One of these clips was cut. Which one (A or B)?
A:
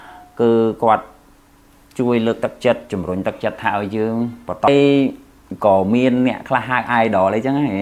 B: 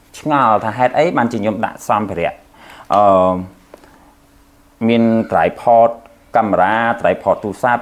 A